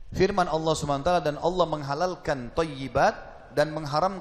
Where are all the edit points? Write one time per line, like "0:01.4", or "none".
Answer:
none